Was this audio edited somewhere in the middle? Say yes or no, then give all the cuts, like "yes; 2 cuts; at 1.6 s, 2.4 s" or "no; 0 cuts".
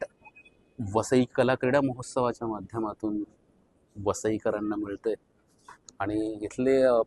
no; 0 cuts